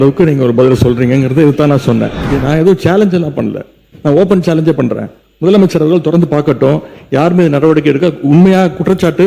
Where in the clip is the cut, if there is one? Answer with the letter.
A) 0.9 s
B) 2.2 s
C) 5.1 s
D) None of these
B